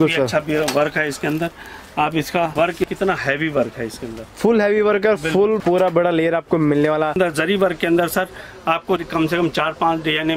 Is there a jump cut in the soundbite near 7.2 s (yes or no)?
yes